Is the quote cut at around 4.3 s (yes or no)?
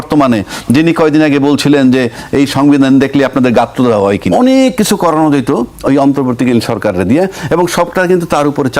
yes